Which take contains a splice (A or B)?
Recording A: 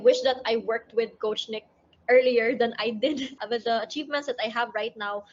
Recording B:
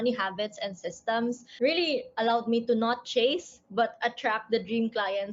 A